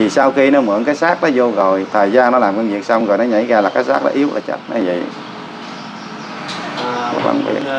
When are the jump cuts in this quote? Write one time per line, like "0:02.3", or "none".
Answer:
none

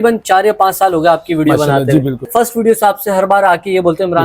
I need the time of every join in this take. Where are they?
0:02.3

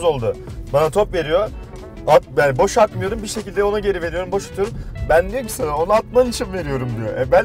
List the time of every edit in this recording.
none

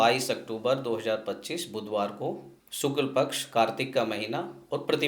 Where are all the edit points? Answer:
none

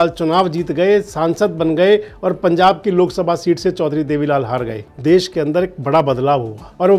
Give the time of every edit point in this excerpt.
0:04.8

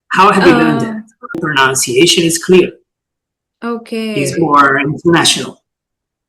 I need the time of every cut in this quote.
0:01.3

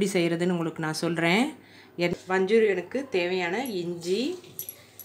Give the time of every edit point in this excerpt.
0:02.1

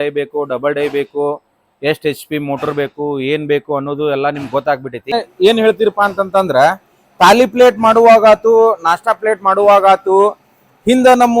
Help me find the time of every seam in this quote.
0:05.1

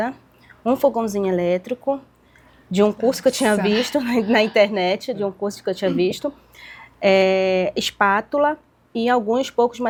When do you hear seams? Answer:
none

